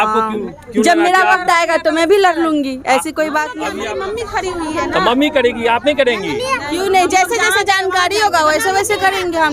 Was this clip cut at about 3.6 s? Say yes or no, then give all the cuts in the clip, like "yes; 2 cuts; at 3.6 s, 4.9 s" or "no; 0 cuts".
yes; 1 cut; at 3.6 s